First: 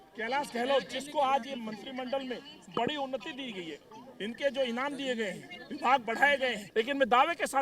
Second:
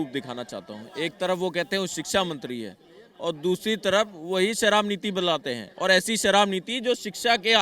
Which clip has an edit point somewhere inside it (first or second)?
first